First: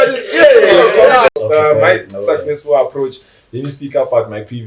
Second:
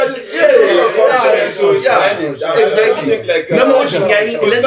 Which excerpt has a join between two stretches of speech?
first; 1 cut; at 1.3 s

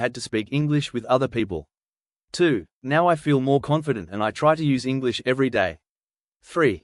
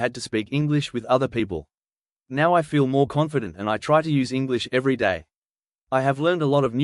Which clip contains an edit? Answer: second; 2 cuts; at 2.2 s, 5.8 s

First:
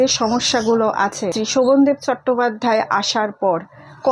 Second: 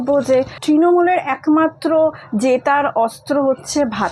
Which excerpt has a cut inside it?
first; 1 cut; at 1.3 s

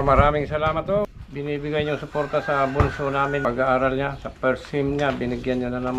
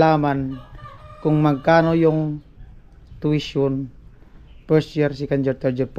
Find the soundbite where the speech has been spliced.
first; 2 cuts; at 1.2 s, 3.4 s

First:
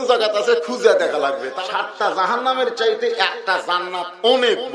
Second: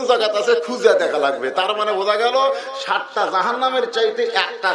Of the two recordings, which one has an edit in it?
first; 1 cut; at 1.5 s

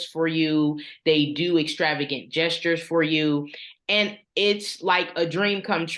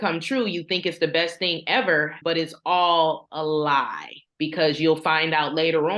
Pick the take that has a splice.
second; 1 cut; at 2.1 s

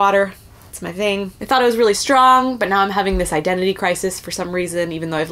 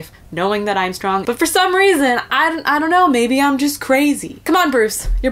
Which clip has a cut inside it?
second; 2 cuts; at 1.2 s, 4.3 s

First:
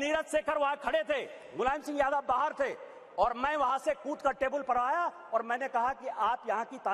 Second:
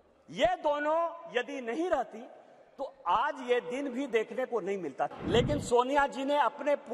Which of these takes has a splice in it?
second; 1 cut; at 5.1 s

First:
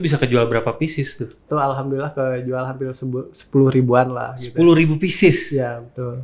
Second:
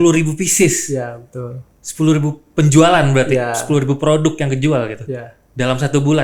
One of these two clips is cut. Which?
first; 1 cut; at 1.4 s

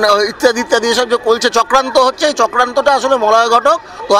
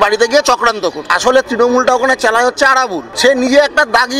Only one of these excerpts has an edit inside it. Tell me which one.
second; 2 cuts; at 1.1 s, 3.0 s

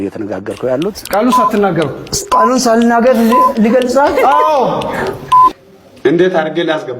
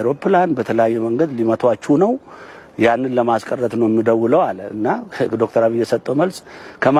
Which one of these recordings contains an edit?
first; 1 cut; at 1.0 s

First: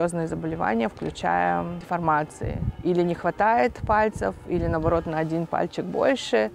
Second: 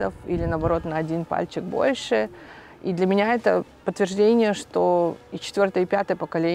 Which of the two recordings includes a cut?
first; 2 cuts; at 1.8 s, 2.7 s

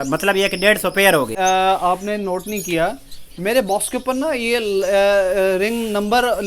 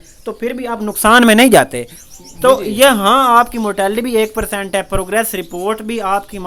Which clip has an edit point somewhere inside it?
first; 1 cut; at 1.3 s

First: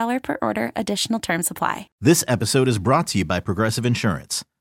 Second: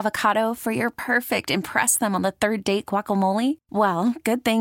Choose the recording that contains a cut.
first; 1 cut; at 1.9 s

